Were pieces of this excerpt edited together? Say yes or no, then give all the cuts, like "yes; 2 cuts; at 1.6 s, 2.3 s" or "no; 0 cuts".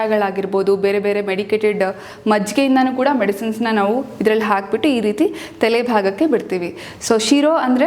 no; 0 cuts